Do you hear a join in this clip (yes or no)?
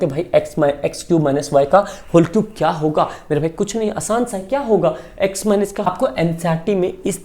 yes